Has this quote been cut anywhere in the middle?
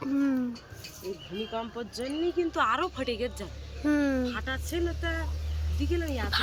no; 0 cuts

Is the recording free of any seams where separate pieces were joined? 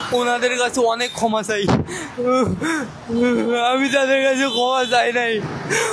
yes; 0 cuts

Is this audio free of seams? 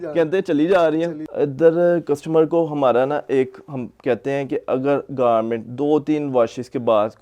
no; 1 cut; at 1.2 s

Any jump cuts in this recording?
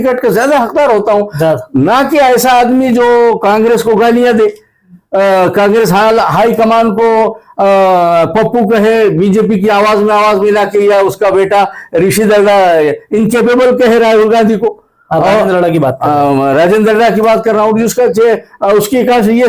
no; 0 cuts

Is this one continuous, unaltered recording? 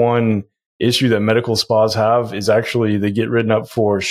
yes; 0 cuts

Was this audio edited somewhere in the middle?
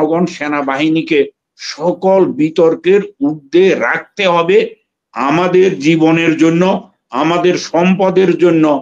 no; 0 cuts

